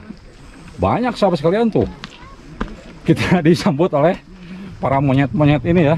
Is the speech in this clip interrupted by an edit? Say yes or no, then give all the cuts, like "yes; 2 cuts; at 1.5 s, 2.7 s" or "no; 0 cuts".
no; 0 cuts